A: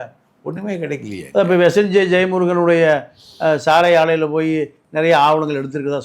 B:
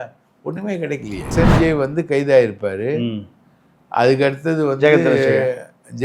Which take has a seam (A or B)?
B